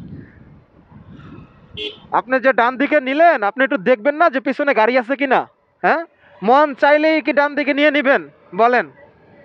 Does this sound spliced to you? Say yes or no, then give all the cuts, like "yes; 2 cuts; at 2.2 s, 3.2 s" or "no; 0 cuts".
no; 0 cuts